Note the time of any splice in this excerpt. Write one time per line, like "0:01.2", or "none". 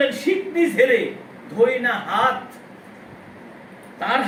none